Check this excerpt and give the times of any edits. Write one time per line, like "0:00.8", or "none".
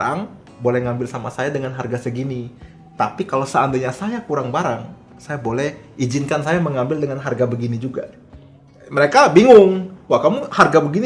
none